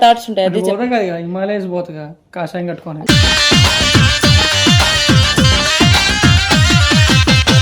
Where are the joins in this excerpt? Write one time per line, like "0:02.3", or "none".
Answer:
none